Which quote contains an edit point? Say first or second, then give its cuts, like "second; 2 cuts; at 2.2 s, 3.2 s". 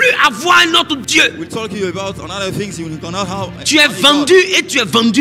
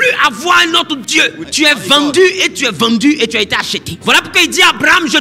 second; 2 cuts; at 1.4 s, 4.0 s